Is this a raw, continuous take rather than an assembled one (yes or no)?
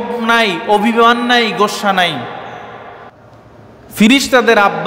no